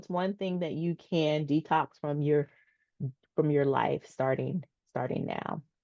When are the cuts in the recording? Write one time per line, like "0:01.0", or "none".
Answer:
none